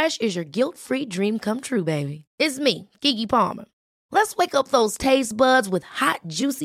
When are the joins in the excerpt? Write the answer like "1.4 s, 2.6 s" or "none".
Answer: none